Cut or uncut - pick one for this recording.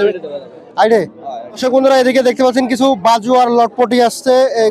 cut